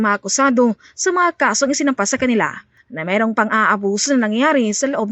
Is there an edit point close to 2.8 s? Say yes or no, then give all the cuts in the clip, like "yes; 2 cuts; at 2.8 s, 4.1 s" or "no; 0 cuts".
yes; 1 cut; at 2.8 s